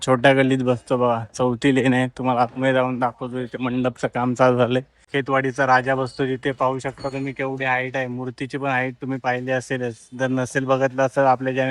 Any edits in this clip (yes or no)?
yes